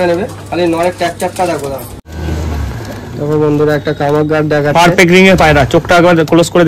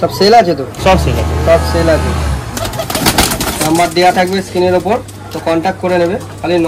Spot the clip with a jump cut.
first; 1 cut; at 2.0 s

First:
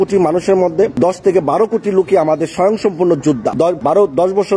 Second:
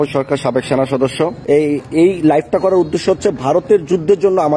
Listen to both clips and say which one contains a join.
first; 2 cuts; at 0.9 s, 3.7 s

